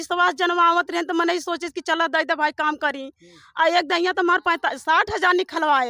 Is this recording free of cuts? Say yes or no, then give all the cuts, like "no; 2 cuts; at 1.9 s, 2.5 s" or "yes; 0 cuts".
yes; 0 cuts